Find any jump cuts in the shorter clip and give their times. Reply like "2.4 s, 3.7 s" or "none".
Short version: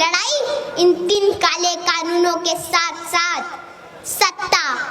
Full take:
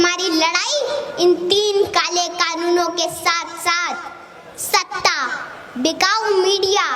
1.2 s